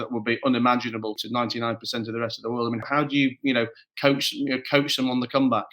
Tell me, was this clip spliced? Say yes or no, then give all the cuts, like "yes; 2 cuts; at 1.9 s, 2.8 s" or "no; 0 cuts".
yes; 2 cuts; at 1.2 s, 2.8 s